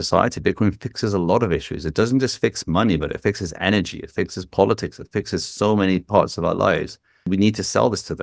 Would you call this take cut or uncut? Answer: cut